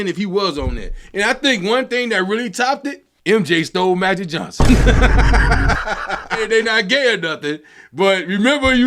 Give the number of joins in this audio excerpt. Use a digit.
1